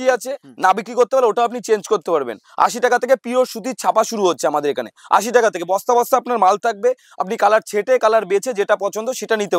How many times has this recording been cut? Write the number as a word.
zero